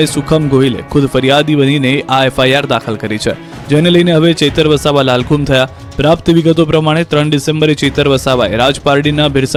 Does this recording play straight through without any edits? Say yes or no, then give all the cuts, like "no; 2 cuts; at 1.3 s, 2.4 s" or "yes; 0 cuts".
yes; 0 cuts